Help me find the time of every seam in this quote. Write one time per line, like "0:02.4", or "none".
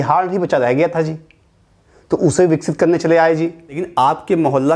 0:03.9